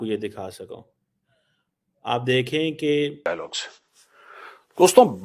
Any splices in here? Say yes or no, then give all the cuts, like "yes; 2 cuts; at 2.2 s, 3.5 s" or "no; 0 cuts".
yes; 1 cut; at 3.3 s